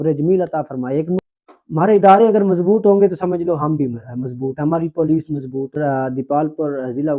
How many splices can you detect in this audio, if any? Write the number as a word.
two